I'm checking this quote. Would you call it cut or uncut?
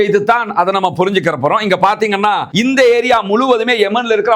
cut